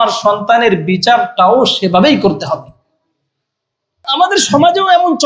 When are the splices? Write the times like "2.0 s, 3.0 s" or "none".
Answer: 4.1 s

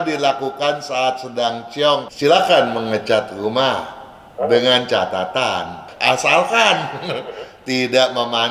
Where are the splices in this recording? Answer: 2.1 s, 5.9 s

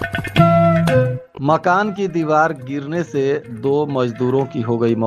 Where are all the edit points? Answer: 1.3 s

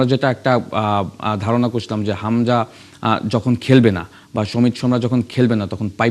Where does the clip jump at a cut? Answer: none

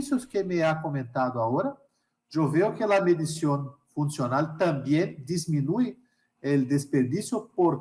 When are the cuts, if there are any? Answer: none

